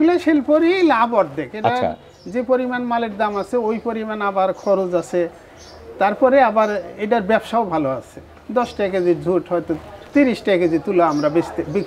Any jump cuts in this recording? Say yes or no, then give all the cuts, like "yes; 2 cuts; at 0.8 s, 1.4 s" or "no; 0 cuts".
no; 0 cuts